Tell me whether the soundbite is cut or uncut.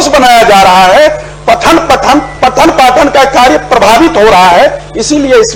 uncut